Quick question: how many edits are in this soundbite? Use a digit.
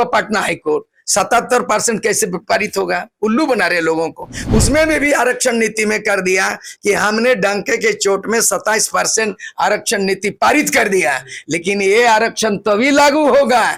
0